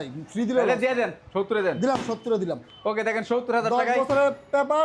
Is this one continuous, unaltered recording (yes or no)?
yes